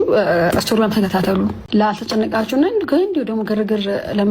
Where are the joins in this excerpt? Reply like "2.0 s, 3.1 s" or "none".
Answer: 1.6 s